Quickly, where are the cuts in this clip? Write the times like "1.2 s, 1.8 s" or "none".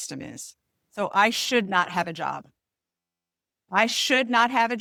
none

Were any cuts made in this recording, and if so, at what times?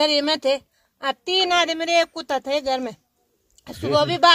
none

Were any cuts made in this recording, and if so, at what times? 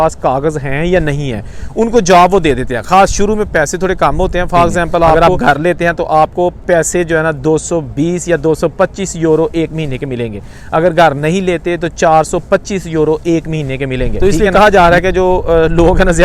5.1 s, 14.1 s

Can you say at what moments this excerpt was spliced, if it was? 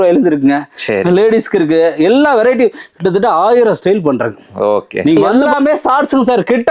5.2 s

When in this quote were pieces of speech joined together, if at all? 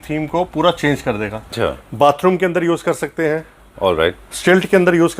1.6 s

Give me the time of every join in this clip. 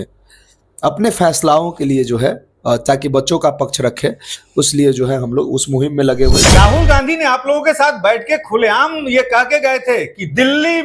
6.4 s

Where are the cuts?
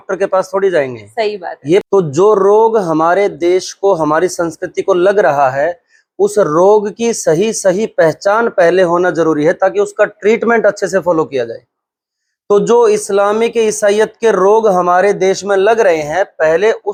none

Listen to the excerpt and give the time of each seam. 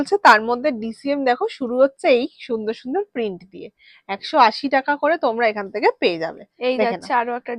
none

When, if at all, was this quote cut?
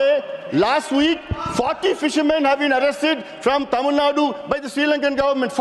none

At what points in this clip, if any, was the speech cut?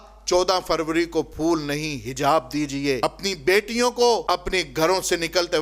3.0 s, 4.2 s

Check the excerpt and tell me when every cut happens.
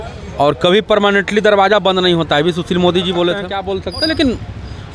3.6 s

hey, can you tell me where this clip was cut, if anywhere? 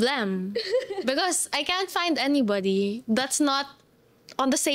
none

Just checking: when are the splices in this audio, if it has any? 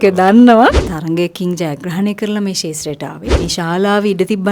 0.9 s, 3.4 s

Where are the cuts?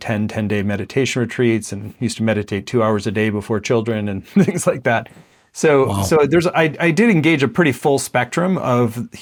none

